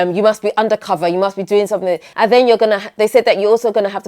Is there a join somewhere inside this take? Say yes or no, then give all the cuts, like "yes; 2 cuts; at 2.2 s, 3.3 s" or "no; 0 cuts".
yes; 1 cut; at 2.1 s